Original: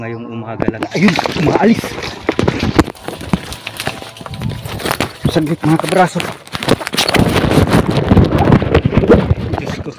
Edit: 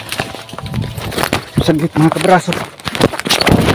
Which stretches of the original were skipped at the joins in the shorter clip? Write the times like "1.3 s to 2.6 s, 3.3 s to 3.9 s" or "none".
none